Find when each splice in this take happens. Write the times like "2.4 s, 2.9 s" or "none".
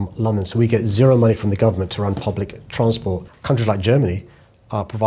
3.2 s